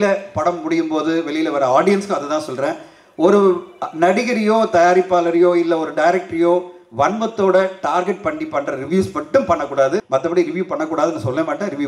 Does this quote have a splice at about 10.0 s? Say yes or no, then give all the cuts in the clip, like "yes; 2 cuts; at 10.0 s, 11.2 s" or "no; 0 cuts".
yes; 1 cut; at 10.0 s